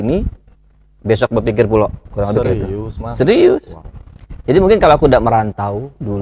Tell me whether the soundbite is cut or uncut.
uncut